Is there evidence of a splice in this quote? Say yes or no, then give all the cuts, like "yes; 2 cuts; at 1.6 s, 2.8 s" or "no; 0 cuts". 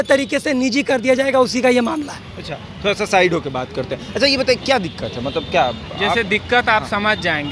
no; 0 cuts